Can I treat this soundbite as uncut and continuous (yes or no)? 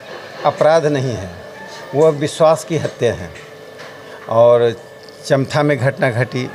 yes